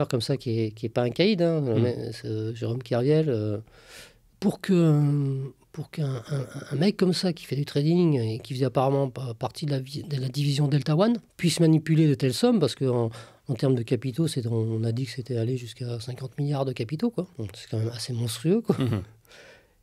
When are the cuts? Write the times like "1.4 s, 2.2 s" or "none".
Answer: 4.3 s